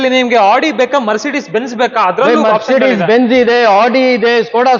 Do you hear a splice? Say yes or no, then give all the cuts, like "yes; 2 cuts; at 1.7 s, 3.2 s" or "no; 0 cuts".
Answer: no; 0 cuts